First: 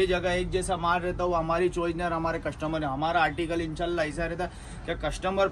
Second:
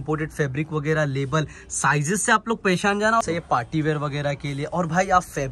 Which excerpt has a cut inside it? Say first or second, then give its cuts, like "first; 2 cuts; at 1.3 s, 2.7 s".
second; 1 cut; at 3.2 s